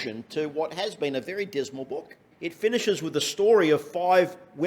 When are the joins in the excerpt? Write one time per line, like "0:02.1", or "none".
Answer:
0:02.2